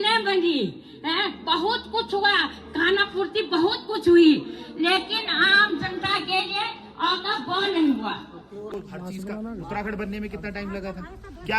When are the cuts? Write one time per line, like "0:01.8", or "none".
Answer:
0:08.7